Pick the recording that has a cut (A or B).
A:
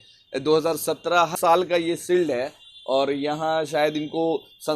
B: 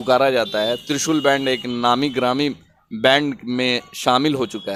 A